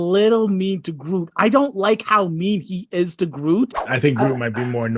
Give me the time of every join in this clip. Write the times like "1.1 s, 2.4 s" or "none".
3.8 s